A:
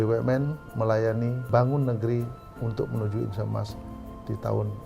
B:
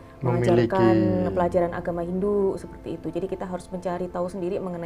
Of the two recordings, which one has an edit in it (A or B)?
A